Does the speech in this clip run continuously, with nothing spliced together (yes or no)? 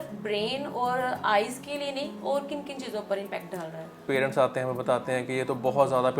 no